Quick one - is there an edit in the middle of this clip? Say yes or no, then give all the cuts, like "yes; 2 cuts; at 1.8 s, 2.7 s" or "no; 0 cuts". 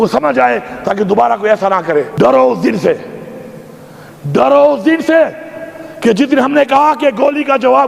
yes; 1 cut; at 2.1 s